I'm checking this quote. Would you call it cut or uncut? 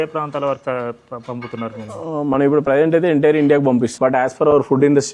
cut